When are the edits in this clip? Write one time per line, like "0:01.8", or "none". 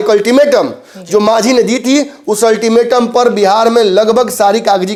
none